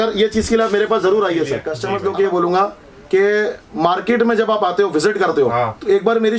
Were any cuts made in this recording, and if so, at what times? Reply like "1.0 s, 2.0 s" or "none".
1.7 s